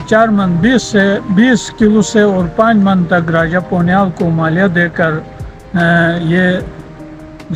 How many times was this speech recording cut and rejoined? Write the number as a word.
zero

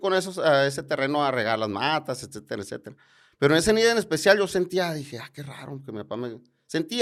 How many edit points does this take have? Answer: zero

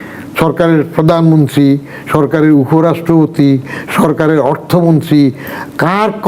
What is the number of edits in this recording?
zero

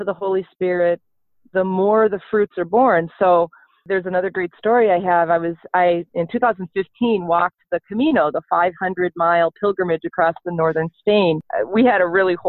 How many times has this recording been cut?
two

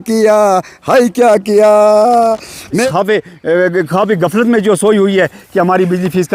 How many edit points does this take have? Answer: one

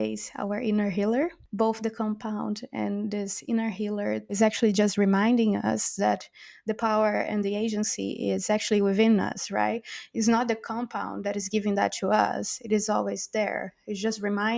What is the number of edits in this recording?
two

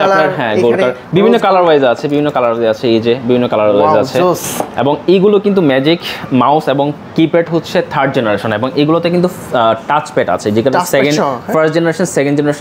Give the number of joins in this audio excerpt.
zero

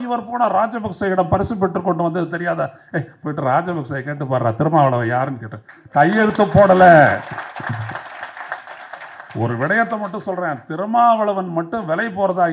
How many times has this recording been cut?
zero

